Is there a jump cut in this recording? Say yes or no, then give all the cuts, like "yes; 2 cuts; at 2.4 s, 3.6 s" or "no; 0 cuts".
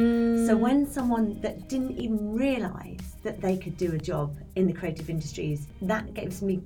yes; 1 cut; at 5.7 s